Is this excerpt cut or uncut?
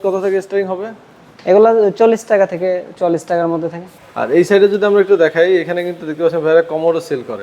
cut